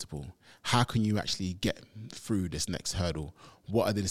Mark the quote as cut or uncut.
uncut